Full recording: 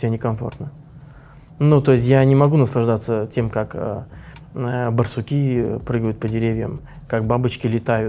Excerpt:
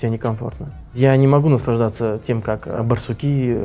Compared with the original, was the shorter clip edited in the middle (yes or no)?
yes